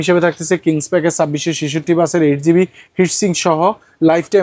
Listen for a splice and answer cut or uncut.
uncut